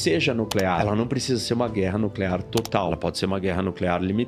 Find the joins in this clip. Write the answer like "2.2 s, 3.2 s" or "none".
0.8 s, 2.9 s